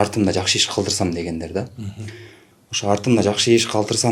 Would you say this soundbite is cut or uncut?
uncut